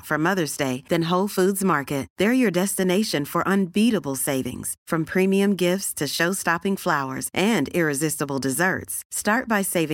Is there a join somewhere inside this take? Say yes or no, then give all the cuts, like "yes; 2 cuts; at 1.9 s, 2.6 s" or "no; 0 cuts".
no; 0 cuts